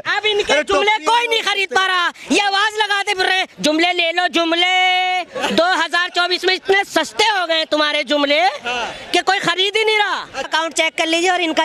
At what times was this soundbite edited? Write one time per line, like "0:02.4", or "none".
0:10.4